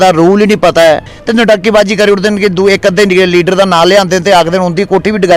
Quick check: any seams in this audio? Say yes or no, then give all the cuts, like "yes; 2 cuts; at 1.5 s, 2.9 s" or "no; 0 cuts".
yes; 1 cut; at 1.1 s